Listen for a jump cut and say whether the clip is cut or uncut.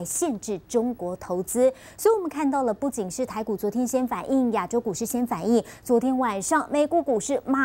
uncut